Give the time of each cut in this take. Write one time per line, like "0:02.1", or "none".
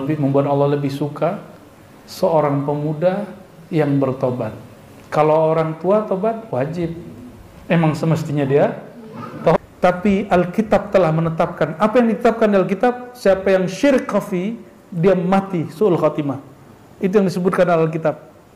0:09.6